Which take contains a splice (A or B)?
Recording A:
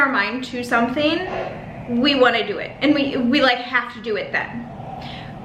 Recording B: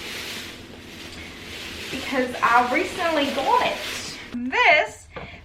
B